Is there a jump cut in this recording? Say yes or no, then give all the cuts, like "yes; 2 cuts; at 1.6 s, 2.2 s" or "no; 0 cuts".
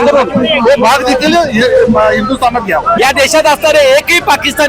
yes; 1 cut; at 2.9 s